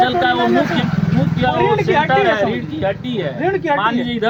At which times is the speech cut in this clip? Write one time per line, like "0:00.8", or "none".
none